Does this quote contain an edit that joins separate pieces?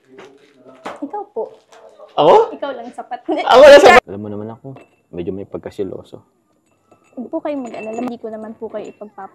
yes; 2 cuts; at 4.0 s, 8.1 s

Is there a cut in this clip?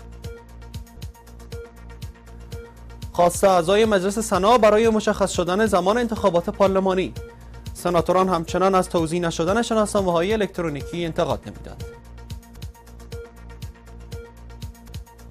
yes; 1 cut; at 0.9 s

